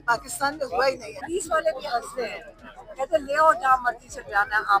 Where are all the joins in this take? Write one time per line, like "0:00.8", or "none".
0:01.2